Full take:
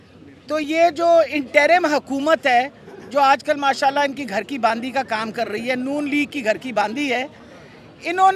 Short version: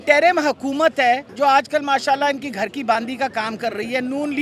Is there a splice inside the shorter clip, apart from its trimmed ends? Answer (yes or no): yes